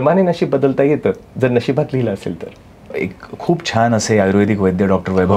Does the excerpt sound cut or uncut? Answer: cut